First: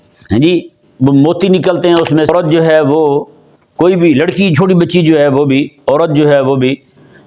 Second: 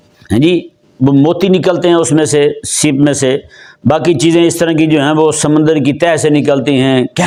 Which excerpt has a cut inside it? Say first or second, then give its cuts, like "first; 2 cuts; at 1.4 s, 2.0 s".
first; 1 cut; at 2.3 s